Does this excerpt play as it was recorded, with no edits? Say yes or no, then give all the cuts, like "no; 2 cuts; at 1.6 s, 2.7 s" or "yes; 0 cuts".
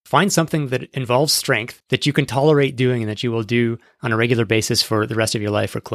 no; 2 cuts; at 0.9 s, 1.7 s